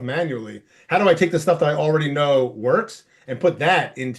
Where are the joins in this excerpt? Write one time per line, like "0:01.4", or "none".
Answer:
none